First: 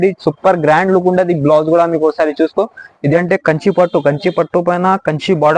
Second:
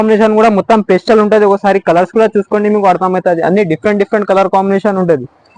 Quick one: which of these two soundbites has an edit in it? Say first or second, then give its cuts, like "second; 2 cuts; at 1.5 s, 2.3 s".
first; 1 cut; at 3.2 s